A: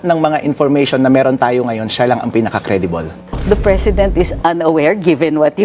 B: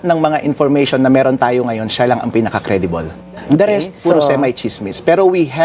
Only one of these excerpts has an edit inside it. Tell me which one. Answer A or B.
A